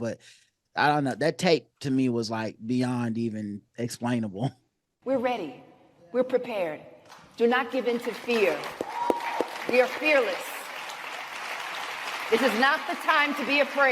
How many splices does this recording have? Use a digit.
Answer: 1